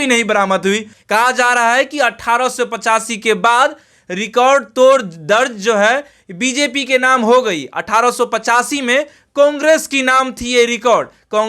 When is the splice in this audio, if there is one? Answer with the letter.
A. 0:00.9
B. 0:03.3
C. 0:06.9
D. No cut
A